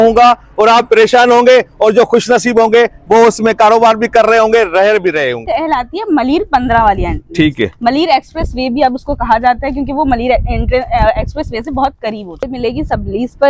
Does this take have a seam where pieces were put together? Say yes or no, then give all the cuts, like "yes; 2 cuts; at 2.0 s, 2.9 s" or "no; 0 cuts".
yes; 2 cuts; at 5.4 s, 12.5 s